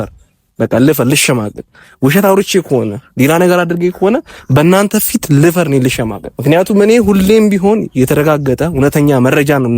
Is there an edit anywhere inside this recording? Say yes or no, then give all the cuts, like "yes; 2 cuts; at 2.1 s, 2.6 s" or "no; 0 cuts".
yes; 1 cut; at 6.2 s